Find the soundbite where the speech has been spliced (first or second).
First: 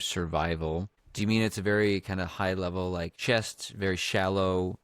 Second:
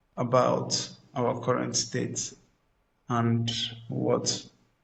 first